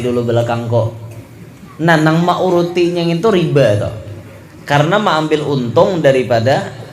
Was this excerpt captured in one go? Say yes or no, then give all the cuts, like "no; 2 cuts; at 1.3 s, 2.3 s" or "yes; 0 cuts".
yes; 0 cuts